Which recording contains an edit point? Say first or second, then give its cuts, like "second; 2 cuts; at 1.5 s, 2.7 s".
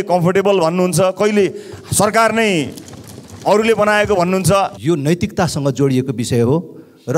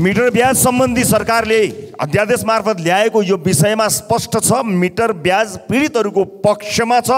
first; 1 cut; at 4.8 s